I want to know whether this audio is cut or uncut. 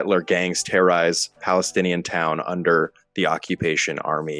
uncut